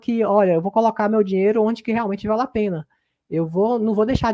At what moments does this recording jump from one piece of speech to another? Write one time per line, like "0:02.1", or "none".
none